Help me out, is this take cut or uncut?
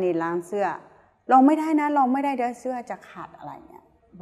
uncut